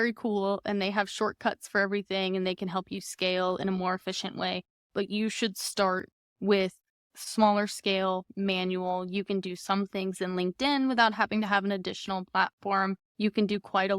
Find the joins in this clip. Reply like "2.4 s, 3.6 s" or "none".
13.1 s